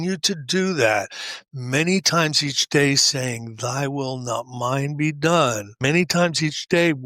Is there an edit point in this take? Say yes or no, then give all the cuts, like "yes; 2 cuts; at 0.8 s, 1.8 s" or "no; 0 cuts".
yes; 1 cut; at 5.7 s